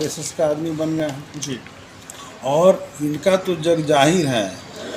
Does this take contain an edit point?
no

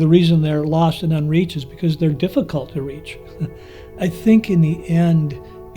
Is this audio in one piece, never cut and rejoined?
no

